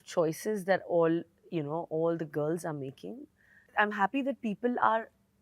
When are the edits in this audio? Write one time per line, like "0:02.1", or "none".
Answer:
0:03.6

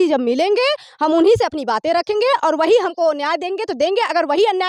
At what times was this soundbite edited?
none

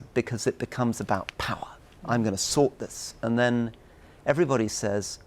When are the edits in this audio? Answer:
none

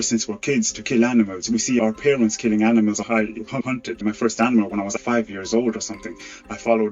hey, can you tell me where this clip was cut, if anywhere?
0:03.6

